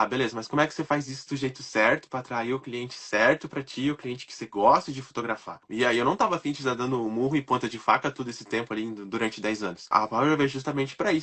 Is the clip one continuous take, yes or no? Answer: no